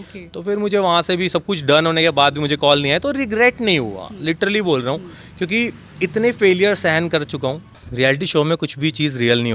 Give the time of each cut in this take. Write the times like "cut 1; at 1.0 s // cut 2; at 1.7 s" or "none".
cut 1; at 7.8 s